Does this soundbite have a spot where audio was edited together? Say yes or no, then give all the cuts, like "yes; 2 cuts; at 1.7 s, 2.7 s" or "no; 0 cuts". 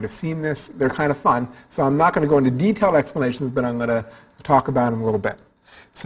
yes; 1 cut; at 0.9 s